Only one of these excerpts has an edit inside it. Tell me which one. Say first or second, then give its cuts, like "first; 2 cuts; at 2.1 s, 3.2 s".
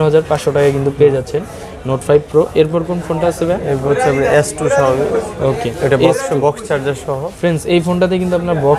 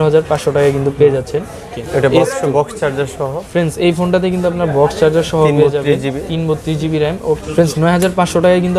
second; 2 cuts; at 1.8 s, 7.4 s